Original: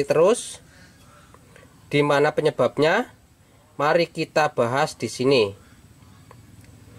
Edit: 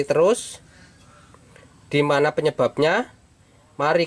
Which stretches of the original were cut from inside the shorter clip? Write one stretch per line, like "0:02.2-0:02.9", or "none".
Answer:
none